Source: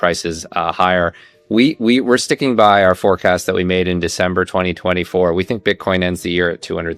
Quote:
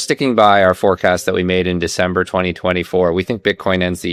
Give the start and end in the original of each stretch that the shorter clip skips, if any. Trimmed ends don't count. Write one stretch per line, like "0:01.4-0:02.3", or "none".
none